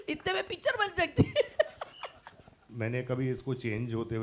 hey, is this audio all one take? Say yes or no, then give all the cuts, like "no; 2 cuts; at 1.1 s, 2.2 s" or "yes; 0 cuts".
no; 1 cut; at 2.6 s